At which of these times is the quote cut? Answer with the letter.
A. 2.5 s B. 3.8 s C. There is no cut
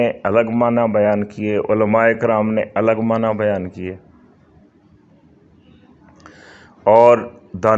C